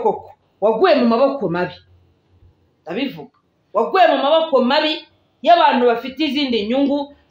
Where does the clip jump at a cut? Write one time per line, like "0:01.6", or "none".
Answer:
none